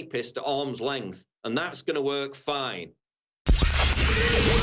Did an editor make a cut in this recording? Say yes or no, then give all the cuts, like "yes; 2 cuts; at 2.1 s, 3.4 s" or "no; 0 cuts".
yes; 1 cut; at 3.3 s